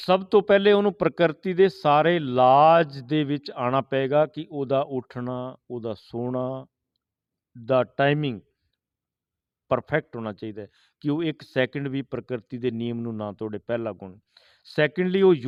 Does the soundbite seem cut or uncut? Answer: uncut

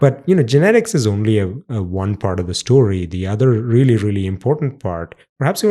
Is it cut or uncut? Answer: uncut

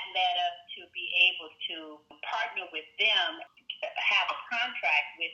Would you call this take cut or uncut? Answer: cut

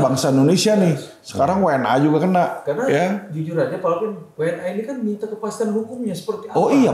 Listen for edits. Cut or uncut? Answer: uncut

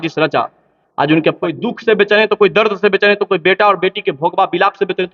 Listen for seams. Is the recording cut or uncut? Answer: cut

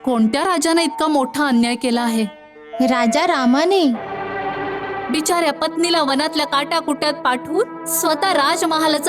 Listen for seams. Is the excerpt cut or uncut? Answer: cut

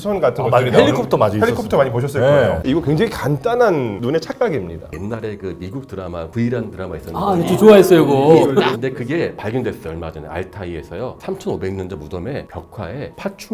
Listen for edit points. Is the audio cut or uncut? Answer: cut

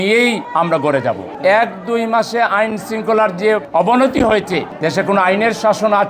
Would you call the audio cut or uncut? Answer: cut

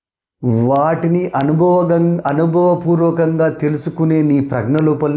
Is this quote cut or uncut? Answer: uncut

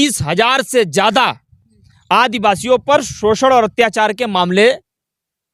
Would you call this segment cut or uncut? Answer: uncut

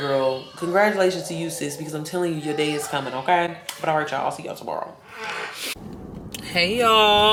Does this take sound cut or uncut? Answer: uncut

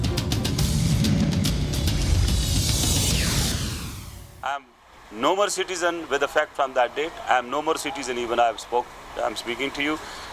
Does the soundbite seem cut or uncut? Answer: cut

